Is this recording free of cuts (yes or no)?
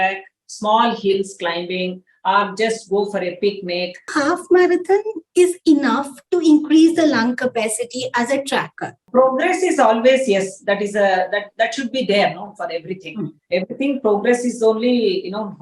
no